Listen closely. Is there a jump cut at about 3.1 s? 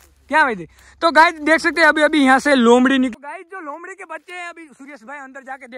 yes; 1 cut; at 3.1 s

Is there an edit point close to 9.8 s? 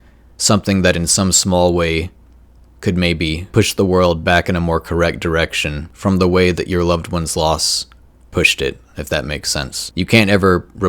yes; 3 cuts; at 3.5 s, 5.9 s, 9.8 s

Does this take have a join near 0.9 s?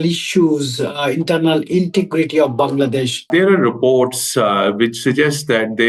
no; 1 cut; at 3.3 s

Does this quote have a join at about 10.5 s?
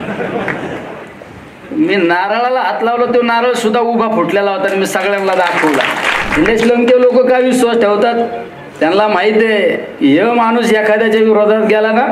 no; 1 cut; at 6.3 s

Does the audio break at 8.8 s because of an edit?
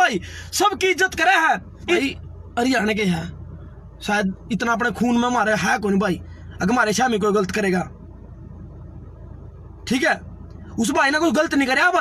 no; 1 cut; at 2.0 s

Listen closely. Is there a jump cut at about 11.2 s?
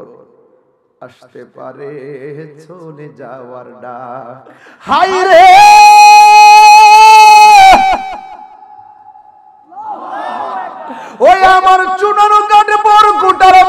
no; 1 cut; at 4.7 s

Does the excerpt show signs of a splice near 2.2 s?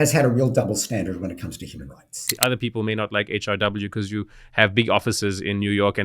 yes; 1 cut; at 2.2 s

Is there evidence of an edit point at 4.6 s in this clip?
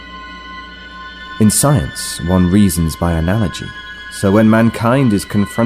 no; 1 cut; at 1.4 s

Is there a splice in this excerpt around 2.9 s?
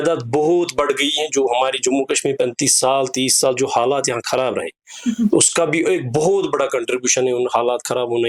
no; 0 cuts

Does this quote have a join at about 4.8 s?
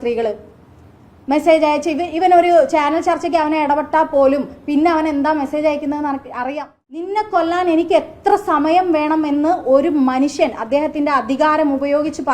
no; 1 cut; at 7.1 s

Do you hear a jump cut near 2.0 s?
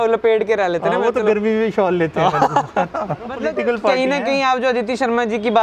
no; 1 cut; at 3.4 s

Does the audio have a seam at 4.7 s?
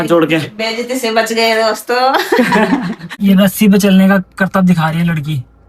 no; 1 cut; at 3.1 s

